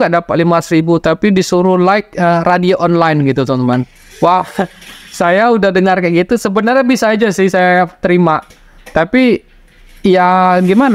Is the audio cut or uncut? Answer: uncut